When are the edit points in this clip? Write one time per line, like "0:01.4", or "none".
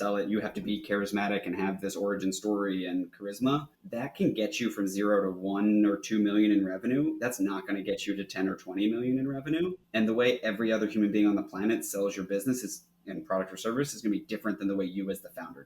0:03.8
0:09.8